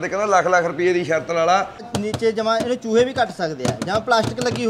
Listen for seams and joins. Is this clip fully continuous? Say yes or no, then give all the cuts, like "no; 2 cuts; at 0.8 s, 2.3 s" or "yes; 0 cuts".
no; 1 cut; at 2.0 s